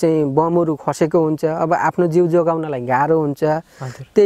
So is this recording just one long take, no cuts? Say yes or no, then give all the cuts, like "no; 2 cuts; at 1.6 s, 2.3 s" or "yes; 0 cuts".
yes; 0 cuts